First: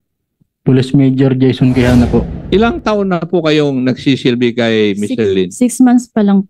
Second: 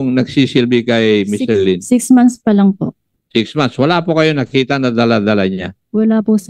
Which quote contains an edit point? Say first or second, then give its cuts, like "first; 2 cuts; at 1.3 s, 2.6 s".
first; 1 cut; at 2.4 s